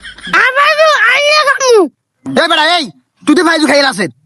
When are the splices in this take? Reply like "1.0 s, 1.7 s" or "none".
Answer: none